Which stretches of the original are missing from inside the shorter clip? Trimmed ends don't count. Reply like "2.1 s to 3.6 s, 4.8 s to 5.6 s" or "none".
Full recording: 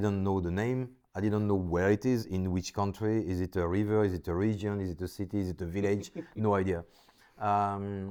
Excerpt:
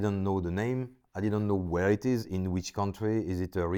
none